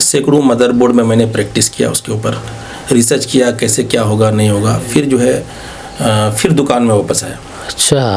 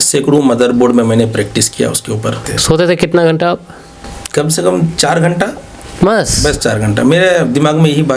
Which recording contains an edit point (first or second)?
second